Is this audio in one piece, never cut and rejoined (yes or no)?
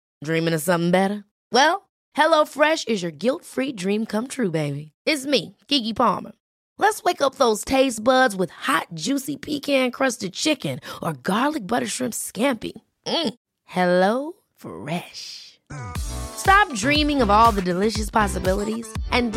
yes